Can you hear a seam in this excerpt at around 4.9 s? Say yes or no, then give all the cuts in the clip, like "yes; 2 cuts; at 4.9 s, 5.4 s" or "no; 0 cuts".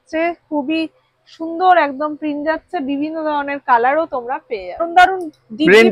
yes; 1 cut; at 4.9 s